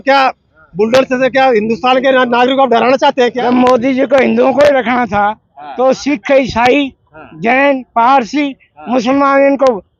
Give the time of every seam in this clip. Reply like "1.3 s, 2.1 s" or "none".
3.4 s